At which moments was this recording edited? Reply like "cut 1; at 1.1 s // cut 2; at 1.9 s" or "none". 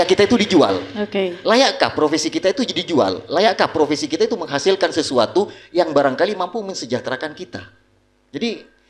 none

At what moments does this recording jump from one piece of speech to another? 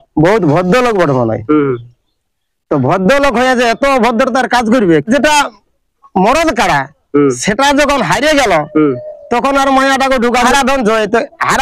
cut 1; at 5.1 s // cut 2; at 10.5 s

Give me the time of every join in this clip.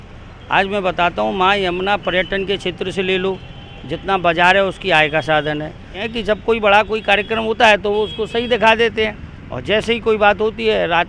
cut 1; at 6.0 s

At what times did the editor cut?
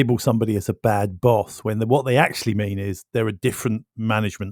none

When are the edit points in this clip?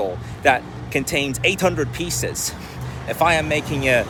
none

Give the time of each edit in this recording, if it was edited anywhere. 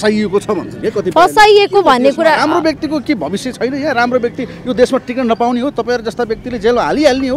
none

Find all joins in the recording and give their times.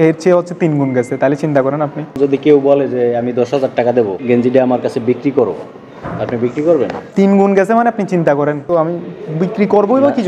cut 1; at 2.2 s // cut 2; at 4.2 s // cut 3; at 7.0 s // cut 4; at 8.6 s

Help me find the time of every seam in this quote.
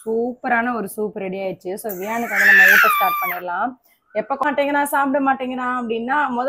cut 1; at 4.4 s

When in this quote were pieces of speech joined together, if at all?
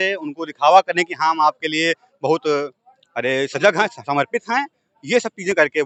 none

